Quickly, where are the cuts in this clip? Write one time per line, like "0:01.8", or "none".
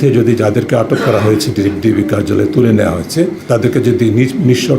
0:03.4